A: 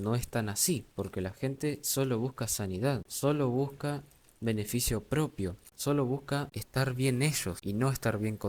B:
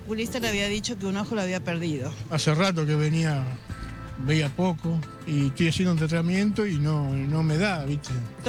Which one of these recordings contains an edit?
A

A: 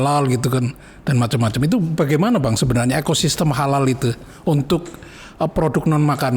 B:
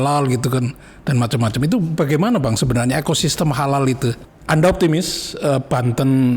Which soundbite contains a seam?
B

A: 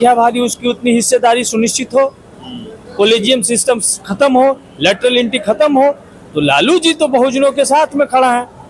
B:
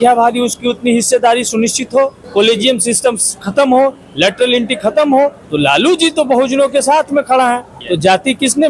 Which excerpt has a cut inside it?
B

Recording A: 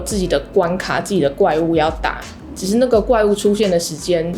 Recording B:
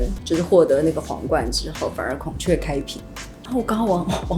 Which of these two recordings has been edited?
B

